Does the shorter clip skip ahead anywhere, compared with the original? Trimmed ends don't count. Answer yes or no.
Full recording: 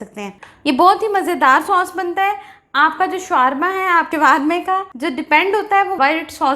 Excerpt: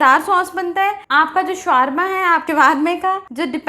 yes